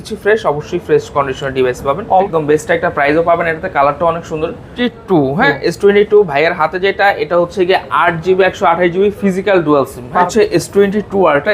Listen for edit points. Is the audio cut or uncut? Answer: cut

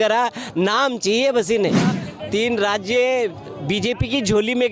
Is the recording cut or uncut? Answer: cut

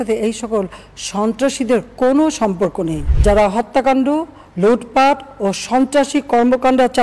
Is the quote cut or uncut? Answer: cut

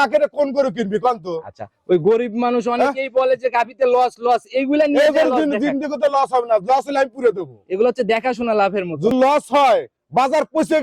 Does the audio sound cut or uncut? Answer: cut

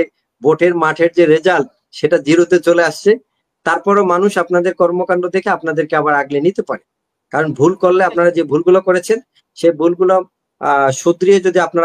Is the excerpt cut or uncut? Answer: uncut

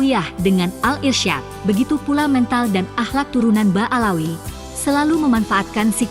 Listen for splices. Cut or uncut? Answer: cut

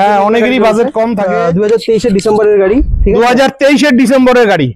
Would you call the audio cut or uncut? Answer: cut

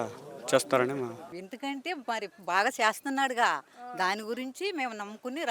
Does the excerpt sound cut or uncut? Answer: cut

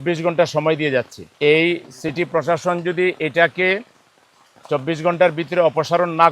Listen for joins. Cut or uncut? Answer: cut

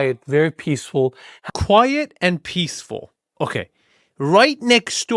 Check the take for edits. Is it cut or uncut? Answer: cut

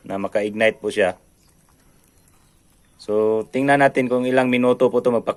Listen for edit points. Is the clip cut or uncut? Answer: uncut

